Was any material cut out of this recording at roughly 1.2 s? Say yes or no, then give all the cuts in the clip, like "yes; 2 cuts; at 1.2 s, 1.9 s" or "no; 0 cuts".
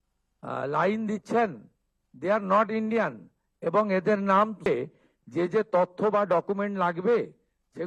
no; 1 cut; at 4.6 s